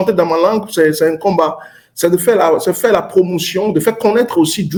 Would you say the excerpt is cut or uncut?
uncut